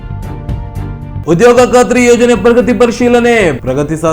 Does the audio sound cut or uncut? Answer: cut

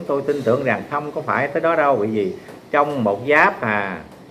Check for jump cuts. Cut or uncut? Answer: uncut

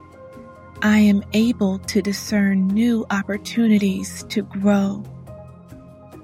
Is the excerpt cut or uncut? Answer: cut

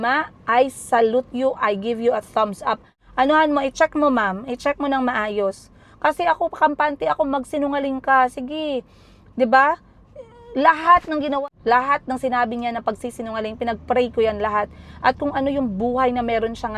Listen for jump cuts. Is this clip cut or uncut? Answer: cut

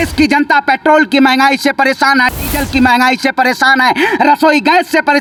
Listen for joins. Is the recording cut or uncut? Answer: uncut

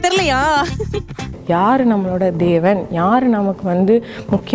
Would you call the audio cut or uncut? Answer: cut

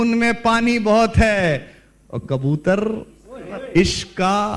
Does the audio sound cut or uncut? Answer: uncut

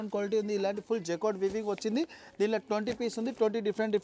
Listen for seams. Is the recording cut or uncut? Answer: uncut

